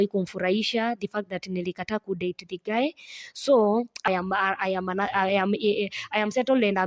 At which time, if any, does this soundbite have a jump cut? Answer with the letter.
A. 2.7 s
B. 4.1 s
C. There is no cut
B